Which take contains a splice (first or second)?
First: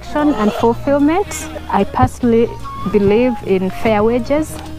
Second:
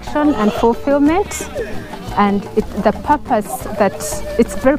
first